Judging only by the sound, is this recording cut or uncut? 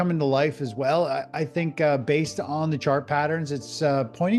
uncut